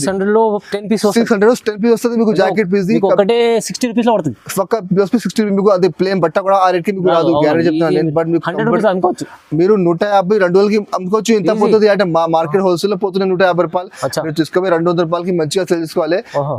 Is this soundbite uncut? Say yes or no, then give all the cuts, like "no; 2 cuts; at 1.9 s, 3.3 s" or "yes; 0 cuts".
yes; 0 cuts